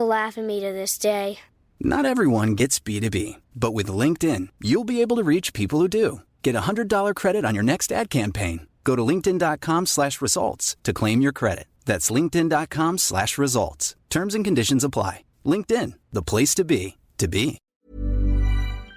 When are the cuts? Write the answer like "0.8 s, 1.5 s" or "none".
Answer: 17.7 s